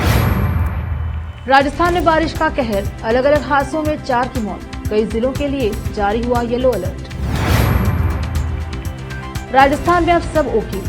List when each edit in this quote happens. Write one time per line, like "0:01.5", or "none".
0:01.3